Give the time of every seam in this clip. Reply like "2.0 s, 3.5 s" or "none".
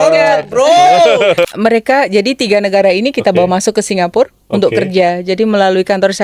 1.5 s